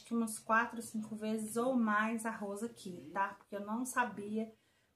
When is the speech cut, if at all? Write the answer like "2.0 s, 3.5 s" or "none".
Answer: none